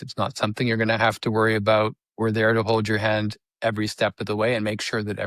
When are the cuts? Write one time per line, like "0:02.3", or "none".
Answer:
none